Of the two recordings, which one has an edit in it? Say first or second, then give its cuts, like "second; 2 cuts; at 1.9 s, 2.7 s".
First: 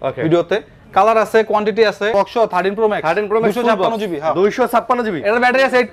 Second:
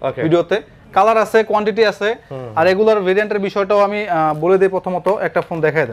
first; 1 cut; at 2.1 s